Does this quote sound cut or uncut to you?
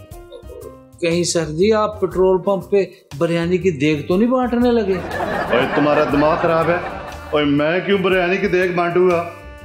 uncut